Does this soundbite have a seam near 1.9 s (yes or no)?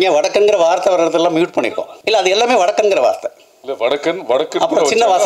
yes